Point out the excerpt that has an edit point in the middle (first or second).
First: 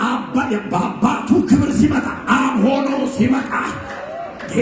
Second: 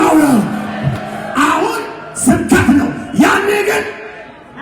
second